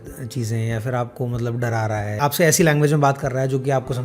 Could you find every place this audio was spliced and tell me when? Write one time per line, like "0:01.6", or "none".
0:02.2